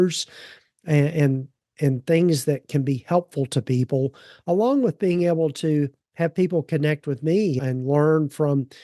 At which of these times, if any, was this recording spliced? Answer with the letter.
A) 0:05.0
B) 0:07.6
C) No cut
B